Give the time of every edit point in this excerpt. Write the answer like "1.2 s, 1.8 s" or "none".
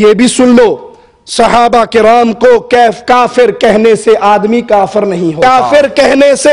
5.4 s